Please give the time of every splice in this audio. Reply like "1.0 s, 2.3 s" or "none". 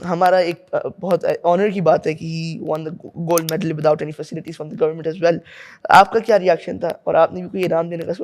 none